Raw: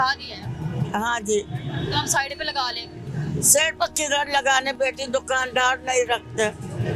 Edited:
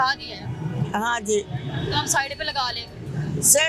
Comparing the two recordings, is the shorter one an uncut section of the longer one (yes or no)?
yes